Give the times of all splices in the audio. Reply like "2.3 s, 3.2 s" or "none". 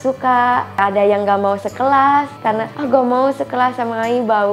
none